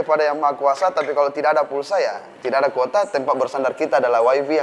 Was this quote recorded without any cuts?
yes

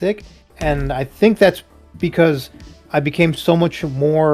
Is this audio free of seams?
yes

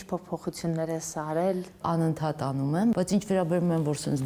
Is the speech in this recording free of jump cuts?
no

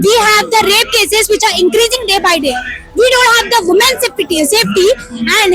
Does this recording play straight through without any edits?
yes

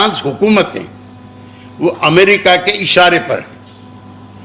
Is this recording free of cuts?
yes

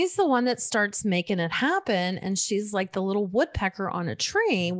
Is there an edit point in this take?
no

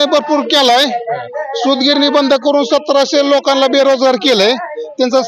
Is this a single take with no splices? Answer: yes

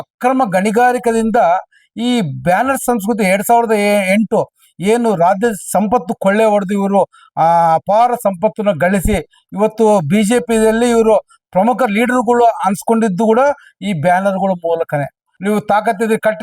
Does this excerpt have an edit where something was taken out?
yes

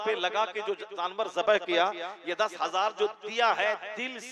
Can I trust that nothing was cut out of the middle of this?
yes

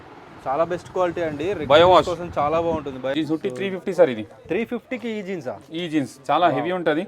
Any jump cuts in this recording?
yes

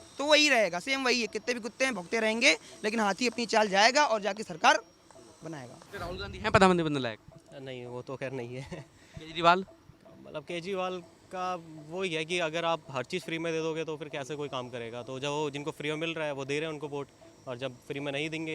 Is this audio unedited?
no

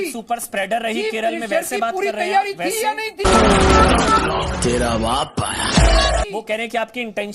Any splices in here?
yes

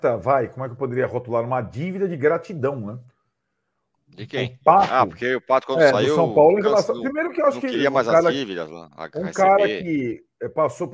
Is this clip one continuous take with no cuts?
yes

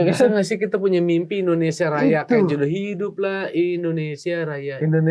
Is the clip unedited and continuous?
yes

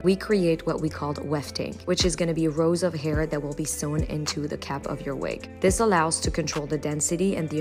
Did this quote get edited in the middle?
no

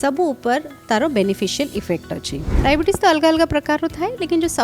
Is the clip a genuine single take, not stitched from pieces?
no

